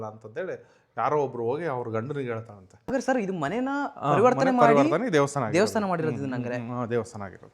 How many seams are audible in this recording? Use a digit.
1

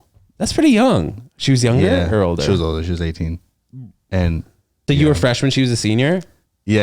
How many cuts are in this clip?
1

